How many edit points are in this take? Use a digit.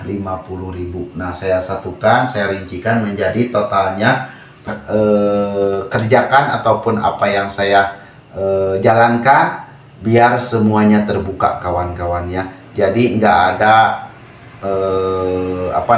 1